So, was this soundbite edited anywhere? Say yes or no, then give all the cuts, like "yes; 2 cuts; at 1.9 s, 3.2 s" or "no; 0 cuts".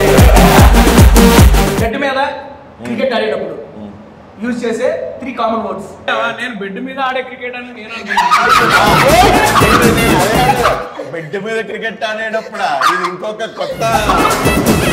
yes; 2 cuts; at 1.8 s, 6.1 s